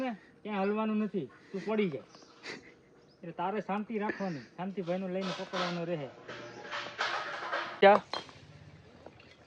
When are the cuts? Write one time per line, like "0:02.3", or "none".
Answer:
0:07.5